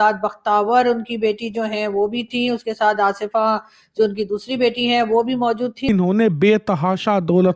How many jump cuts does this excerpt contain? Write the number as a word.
one